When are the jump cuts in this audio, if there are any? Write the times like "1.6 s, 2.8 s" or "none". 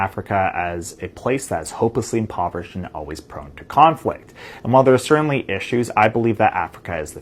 none

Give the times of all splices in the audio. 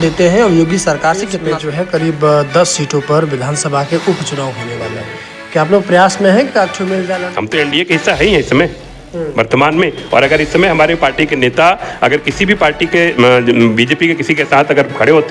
1.4 s, 7.2 s

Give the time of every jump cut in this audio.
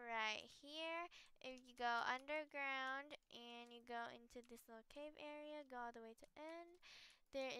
none

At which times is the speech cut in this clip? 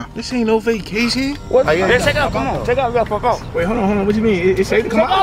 1.7 s

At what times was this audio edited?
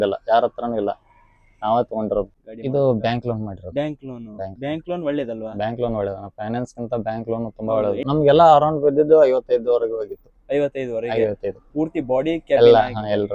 2.4 s, 8.1 s

